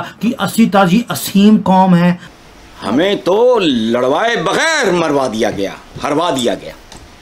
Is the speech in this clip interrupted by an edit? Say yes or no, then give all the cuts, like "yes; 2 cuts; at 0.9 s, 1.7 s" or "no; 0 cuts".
yes; 1 cut; at 2.2 s